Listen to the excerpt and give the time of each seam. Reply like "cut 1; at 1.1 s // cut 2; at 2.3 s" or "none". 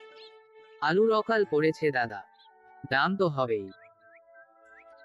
none